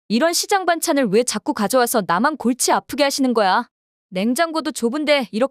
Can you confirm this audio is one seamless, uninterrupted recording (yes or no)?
yes